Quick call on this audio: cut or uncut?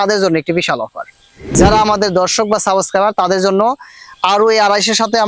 cut